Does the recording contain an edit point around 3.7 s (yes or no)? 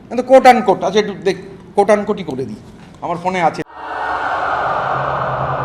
yes